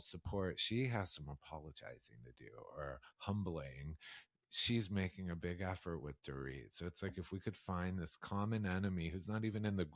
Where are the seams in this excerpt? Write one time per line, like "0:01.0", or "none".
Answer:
none